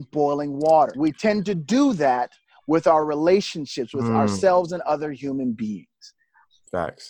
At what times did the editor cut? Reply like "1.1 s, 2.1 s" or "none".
0.9 s